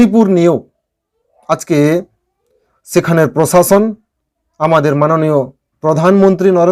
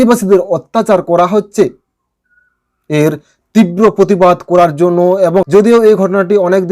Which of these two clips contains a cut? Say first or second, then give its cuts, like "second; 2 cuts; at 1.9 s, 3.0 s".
second; 1 cut; at 5.6 s